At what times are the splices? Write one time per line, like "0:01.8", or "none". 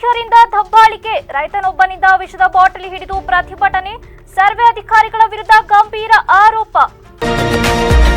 0:07.0